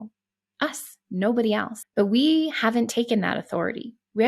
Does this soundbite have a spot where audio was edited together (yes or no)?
yes